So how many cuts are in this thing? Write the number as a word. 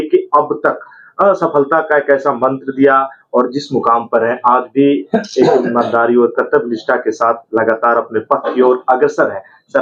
zero